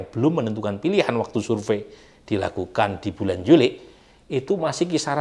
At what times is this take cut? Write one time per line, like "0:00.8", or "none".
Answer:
none

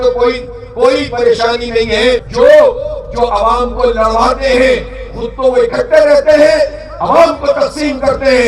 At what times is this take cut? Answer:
0:02.3

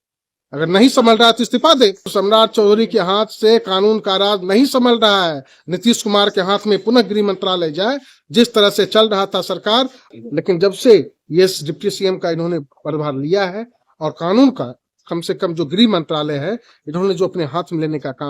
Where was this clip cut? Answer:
0:02.1
0:10.1

